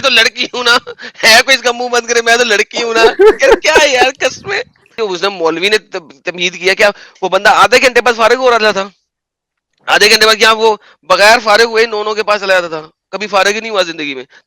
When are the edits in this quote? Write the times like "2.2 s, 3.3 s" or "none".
4.9 s